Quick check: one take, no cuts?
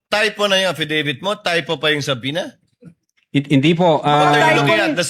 yes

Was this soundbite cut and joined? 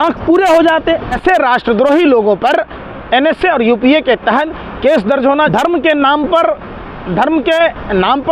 yes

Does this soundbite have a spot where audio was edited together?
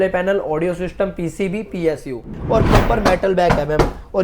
yes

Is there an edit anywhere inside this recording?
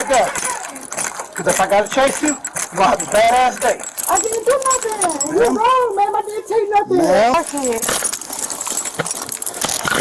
yes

